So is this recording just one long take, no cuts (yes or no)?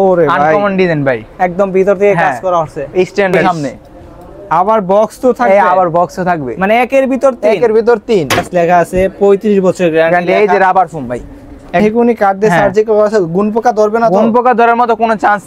no